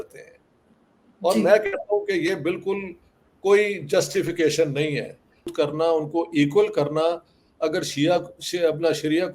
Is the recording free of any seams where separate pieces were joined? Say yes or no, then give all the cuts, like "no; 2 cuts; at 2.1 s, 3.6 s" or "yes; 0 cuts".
no; 1 cut; at 5.5 s